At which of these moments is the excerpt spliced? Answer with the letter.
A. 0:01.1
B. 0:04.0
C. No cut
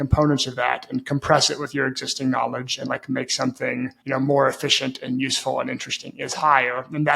B